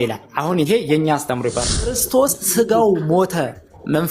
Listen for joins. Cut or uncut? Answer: cut